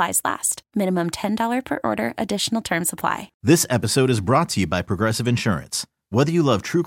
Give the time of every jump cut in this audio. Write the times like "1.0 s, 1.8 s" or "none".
3.3 s